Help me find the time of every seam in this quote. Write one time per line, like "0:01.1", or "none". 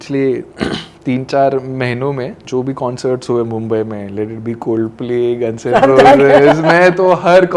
none